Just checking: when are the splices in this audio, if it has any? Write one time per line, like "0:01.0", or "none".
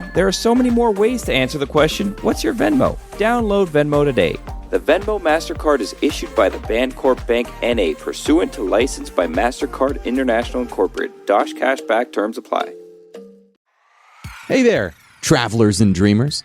0:13.5